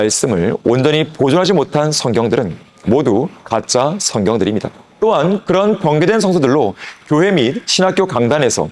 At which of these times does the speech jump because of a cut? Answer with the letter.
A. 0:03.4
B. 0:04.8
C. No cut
B